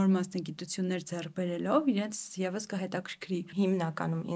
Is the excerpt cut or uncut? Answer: cut